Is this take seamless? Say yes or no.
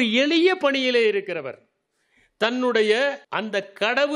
no